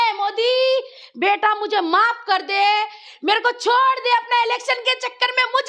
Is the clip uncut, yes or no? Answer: yes